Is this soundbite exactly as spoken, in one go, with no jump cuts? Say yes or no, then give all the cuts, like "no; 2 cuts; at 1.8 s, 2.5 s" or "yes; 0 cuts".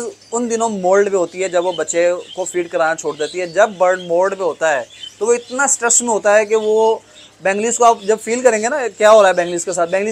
yes; 0 cuts